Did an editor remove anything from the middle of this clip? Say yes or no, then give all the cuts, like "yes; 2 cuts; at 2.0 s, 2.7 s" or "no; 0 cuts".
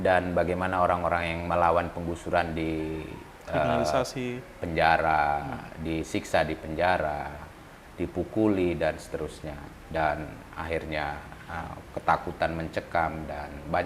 no; 0 cuts